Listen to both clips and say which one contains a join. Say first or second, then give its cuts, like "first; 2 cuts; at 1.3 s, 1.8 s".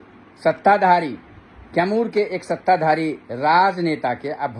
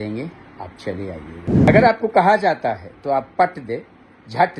second; 1 cut; at 1.7 s